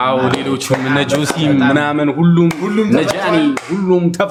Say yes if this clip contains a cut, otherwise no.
no